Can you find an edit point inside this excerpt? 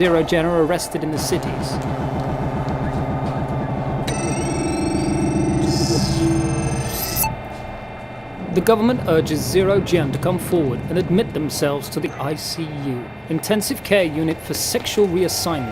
yes; 1 cut; at 10.1 s

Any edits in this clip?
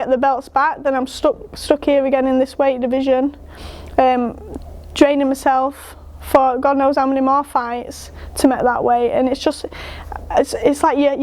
no; 0 cuts

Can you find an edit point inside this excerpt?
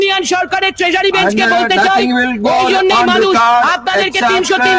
no; 0 cuts

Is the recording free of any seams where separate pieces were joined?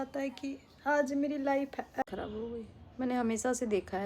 no; 1 cut; at 2.0 s

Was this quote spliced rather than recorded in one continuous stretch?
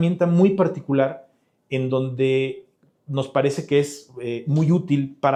no; 0 cuts

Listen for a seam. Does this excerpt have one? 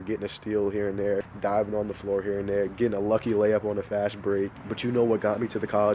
yes; 2 cuts; at 1.3 s, 4.6 s

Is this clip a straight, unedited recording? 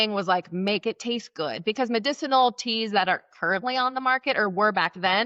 yes; 0 cuts

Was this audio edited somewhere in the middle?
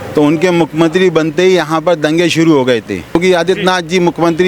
yes; 1 cut; at 3.1 s

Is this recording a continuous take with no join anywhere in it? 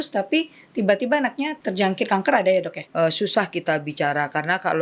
no; 2 cuts; at 1.6 s, 2.8 s

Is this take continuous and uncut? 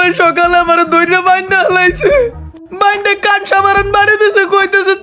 yes; 0 cuts

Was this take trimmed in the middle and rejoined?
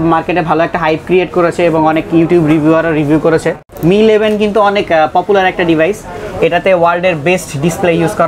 yes; 1 cut; at 3.7 s

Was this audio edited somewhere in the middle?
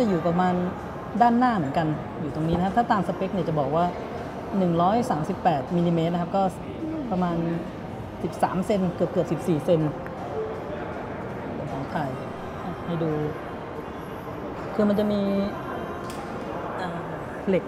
no; 0 cuts

